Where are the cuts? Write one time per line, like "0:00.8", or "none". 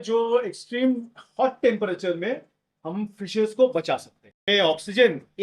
0:04.5

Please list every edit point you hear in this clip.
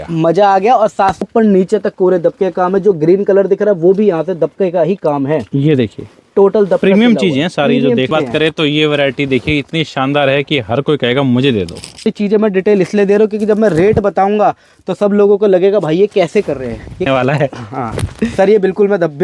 0:01.3
0:08.1
0:12.1
0:17.1

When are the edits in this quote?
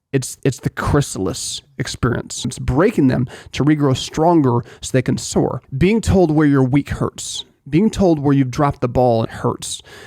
0:02.6
0:05.6
0:09.3

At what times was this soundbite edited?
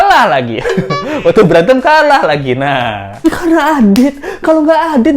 0:03.2

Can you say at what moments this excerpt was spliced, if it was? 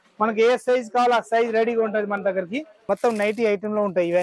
0:02.8

